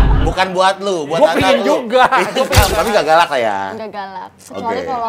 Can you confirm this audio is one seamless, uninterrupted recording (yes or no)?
no